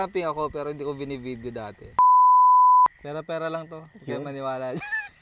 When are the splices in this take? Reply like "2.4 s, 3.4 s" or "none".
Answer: 2.0 s, 2.9 s